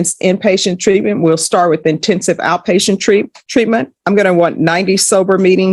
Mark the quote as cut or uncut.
cut